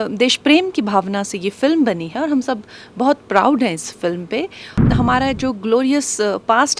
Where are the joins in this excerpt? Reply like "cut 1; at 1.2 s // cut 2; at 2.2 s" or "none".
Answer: cut 1; at 4.8 s